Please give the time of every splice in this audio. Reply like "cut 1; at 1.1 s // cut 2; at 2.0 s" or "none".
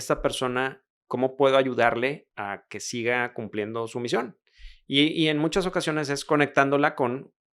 cut 1; at 0.9 s // cut 2; at 2.3 s